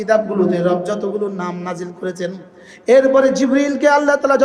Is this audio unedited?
yes; 0 cuts

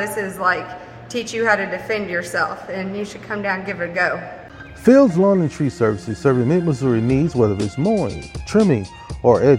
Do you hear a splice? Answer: yes; 1 cut; at 4.3 s

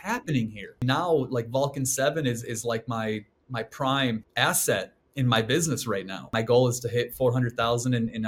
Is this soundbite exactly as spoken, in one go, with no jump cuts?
no; 3 cuts; at 0.8 s, 4.3 s, 6.3 s

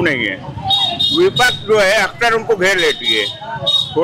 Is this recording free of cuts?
yes; 0 cuts

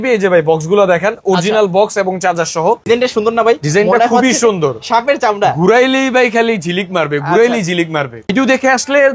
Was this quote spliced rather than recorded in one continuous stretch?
yes; 2 cuts; at 2.8 s, 8.2 s

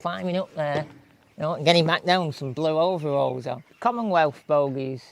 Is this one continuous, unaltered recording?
no; 1 cut; at 3.6 s

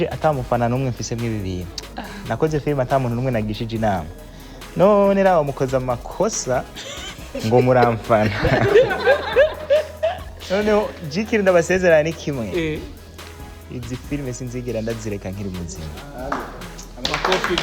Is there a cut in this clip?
no; 0 cuts

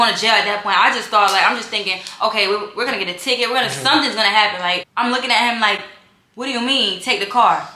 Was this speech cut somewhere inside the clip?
yes; 1 cut; at 4.8 s

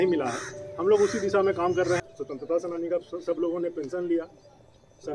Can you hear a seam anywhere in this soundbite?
yes; 1 cut; at 2.0 s

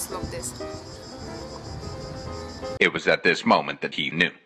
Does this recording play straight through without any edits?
yes; 0 cuts

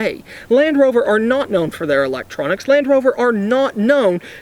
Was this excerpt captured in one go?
yes; 0 cuts

